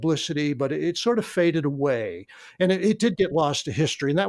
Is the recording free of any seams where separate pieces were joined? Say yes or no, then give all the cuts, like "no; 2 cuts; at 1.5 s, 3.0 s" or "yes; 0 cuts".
yes; 0 cuts